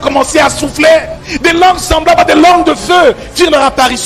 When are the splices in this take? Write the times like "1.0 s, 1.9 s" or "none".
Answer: 1.2 s